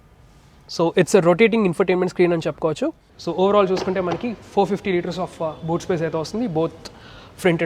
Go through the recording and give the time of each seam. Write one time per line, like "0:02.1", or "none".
0:03.1